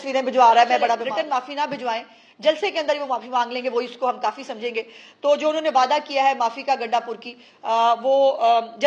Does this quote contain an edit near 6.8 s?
no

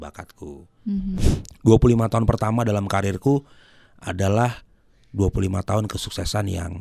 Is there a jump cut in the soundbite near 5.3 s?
no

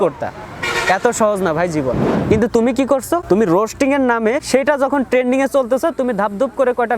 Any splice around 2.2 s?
yes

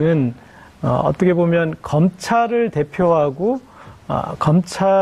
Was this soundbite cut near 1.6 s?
yes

